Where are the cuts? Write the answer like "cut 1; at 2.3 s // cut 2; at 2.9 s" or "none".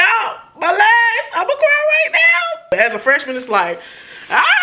cut 1; at 2.7 s